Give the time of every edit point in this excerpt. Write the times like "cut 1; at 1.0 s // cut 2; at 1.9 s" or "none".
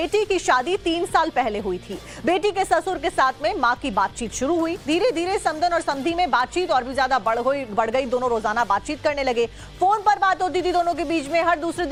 none

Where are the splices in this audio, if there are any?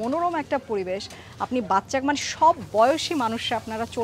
none

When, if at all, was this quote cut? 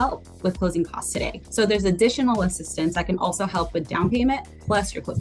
none

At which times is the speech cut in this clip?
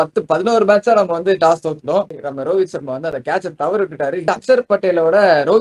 cut 1; at 2.2 s // cut 2; at 4.3 s

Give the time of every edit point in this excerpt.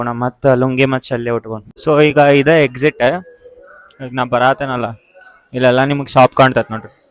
cut 1; at 1.6 s

